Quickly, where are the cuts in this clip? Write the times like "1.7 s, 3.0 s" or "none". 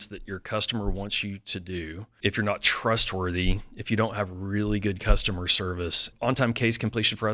2.1 s, 6.1 s